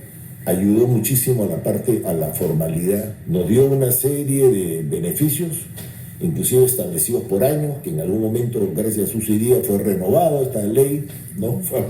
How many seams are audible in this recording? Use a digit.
1